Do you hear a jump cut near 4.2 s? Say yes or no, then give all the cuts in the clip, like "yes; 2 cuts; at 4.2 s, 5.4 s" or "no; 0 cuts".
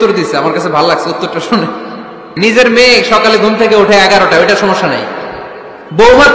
no; 1 cut; at 2.3 s